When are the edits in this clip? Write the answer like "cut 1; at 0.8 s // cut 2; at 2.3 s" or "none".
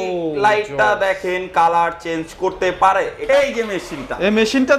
cut 1; at 3.2 s